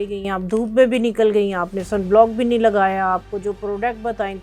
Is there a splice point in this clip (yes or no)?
no